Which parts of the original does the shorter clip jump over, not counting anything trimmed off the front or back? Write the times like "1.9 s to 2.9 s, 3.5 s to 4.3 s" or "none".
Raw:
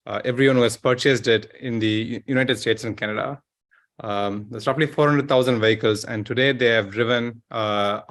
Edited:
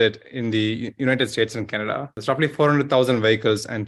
3.4 s to 4.5 s